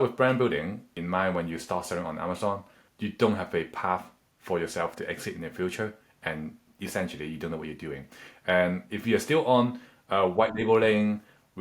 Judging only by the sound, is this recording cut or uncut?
cut